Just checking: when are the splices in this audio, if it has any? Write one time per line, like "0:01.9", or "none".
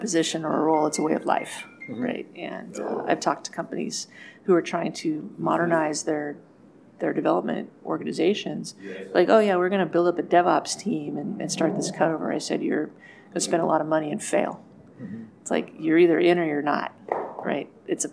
none